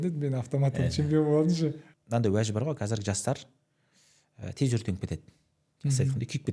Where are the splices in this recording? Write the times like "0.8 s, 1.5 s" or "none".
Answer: 1.9 s